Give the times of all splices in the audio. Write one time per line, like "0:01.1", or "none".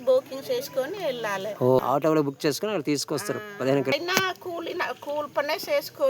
0:01.8
0:03.9